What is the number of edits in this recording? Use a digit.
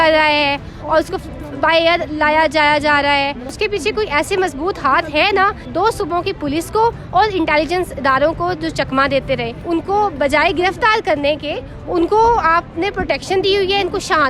3